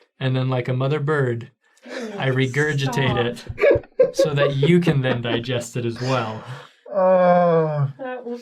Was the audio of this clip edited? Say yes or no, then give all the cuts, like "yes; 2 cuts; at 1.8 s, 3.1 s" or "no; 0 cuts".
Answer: yes; 1 cut; at 6.8 s